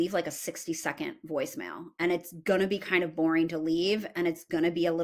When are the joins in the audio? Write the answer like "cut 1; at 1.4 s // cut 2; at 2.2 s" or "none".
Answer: none